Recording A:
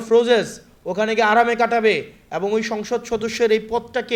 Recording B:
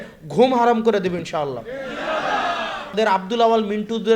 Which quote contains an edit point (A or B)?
B